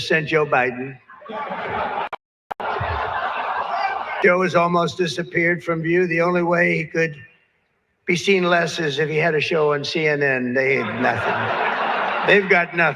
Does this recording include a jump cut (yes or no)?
yes